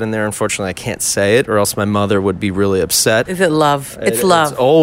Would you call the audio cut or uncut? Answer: cut